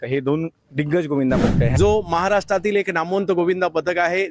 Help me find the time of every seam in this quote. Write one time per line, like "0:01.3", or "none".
0:01.6